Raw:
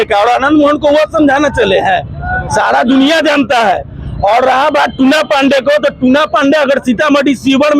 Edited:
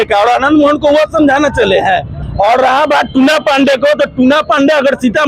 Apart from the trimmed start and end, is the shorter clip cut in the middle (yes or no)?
yes